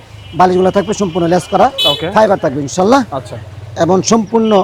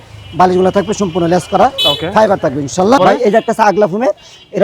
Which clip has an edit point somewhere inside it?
second; 1 cut; at 3.0 s

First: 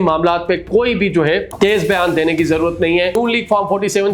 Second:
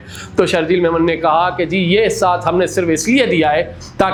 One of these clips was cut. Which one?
first; 2 cuts; at 1.5 s, 3.2 s

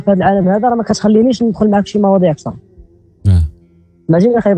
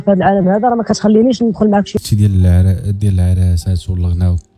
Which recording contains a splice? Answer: second; 1 cut; at 2.0 s

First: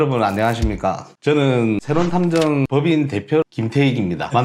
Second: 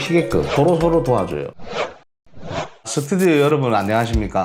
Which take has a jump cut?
second; 1 cut; at 1.4 s

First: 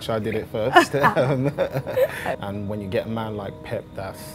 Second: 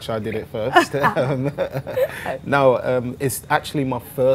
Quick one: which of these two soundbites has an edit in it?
first; 1 cut; at 2.4 s

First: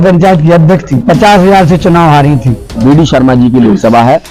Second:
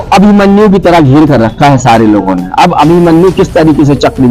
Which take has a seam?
first; 1 cut; at 2.8 s

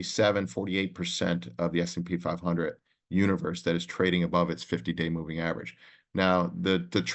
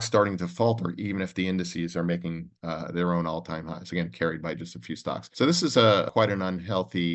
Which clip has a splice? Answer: second; 2 cuts; at 5.3 s, 6.1 s

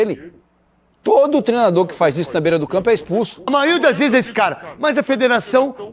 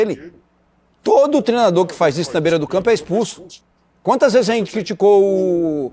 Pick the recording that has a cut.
first; 1 cut; at 3.4 s

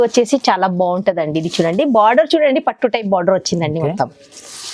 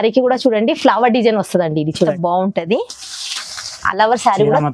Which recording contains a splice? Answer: second; 1 cut; at 2.1 s

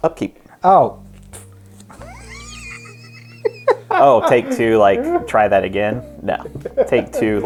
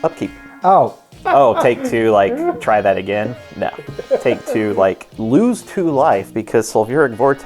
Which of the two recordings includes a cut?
second; 2 cuts; at 1.2 s, 5.1 s

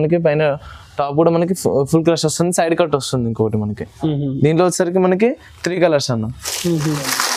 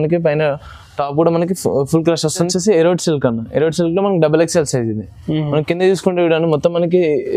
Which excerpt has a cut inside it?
second; 1 cut; at 2.5 s

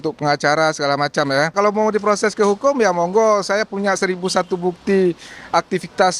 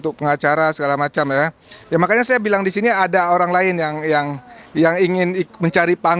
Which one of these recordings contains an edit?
first; 1 cut; at 1.5 s

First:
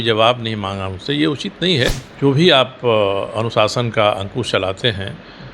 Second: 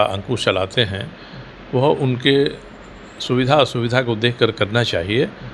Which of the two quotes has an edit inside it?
first; 1 cut; at 2.1 s

